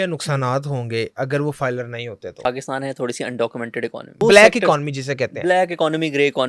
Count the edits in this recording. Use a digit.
2